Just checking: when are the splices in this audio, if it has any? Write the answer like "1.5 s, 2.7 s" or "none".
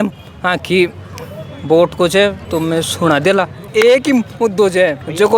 3.7 s